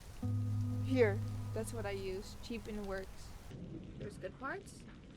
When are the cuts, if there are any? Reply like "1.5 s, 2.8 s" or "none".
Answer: 3.4 s